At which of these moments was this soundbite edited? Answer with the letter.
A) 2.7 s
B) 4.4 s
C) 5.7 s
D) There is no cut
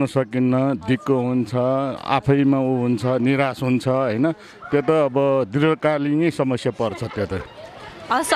D